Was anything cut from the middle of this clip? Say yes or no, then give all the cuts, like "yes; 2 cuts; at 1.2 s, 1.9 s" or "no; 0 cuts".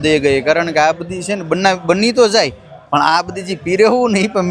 no; 0 cuts